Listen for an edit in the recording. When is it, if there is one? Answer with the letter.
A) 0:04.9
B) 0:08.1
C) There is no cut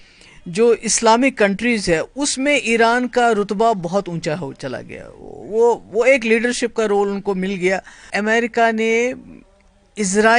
B